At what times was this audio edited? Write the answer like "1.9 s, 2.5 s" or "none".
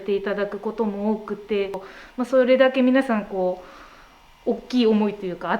1.9 s